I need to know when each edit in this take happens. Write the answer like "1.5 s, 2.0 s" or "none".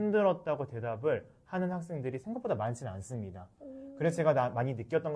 none